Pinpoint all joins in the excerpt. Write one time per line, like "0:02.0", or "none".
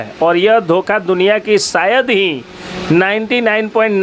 none